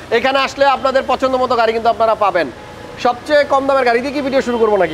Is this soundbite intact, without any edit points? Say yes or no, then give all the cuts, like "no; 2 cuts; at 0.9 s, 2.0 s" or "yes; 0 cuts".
yes; 0 cuts